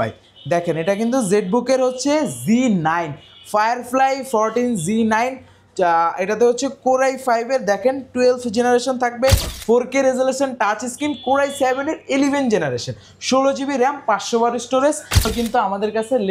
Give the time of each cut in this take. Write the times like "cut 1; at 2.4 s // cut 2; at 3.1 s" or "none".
cut 1; at 9.5 s // cut 2; at 15.3 s